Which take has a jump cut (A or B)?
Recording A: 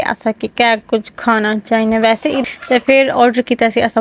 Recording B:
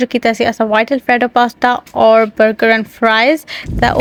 A